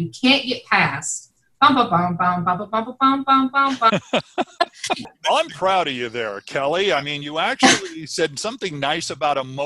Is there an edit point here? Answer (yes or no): yes